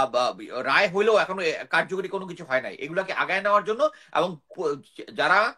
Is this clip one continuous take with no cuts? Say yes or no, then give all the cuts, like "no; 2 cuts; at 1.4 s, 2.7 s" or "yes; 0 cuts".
yes; 0 cuts